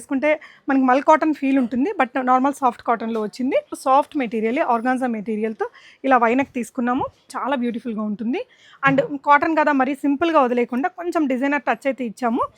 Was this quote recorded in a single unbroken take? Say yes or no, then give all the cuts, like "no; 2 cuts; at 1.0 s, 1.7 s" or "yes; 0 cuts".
no; 2 cuts; at 3.7 s, 7.3 s